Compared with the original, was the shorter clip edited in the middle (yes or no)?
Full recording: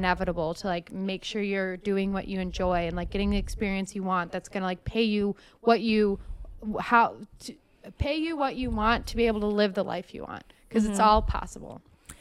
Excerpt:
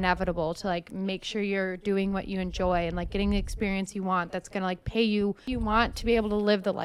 yes